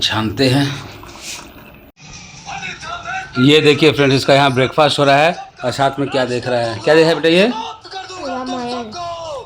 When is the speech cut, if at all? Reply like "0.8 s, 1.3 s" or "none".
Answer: 1.9 s

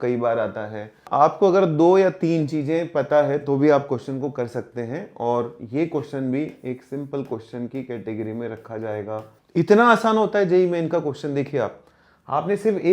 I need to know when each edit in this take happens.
1.0 s, 9.4 s

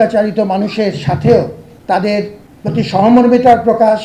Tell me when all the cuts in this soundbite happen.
1.7 s, 2.4 s

